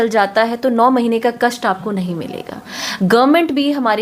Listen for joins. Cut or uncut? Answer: uncut